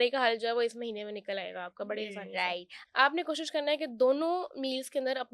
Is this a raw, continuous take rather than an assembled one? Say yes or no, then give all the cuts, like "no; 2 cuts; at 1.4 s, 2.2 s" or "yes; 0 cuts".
no; 1 cut; at 2.7 s